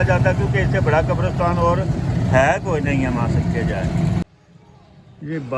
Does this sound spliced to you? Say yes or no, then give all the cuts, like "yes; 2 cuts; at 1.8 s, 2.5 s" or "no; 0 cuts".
yes; 1 cut; at 4.2 s